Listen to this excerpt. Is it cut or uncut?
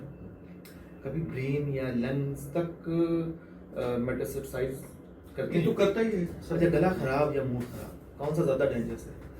cut